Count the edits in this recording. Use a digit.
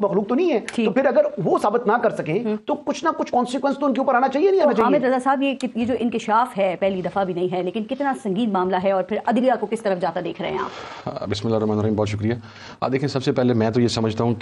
0